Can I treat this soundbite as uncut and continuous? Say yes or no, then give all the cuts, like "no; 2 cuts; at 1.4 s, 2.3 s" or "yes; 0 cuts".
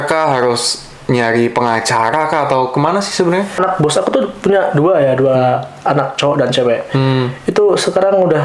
no; 1 cut; at 3.5 s